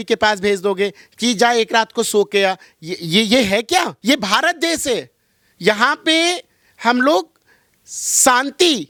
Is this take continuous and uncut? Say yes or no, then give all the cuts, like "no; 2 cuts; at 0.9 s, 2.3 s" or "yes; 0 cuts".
yes; 0 cuts